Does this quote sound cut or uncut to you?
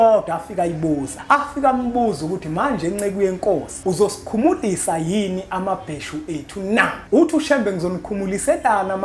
cut